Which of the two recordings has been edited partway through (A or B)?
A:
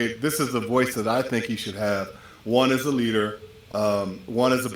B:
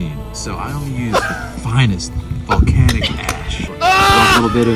B